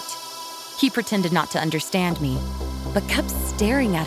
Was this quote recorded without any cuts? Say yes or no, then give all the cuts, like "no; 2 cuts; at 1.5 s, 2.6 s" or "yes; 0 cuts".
yes; 0 cuts